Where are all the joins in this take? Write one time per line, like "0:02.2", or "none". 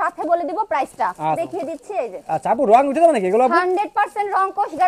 0:01.4

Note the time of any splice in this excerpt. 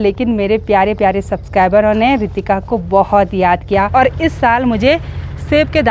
0:03.9

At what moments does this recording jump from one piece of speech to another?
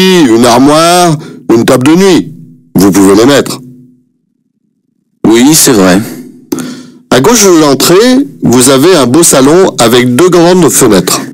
0:00.9

